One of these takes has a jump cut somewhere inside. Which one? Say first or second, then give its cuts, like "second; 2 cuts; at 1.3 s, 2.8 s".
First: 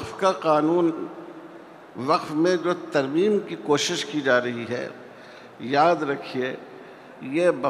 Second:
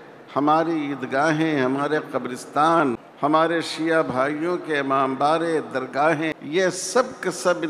second; 2 cuts; at 3.1 s, 6.4 s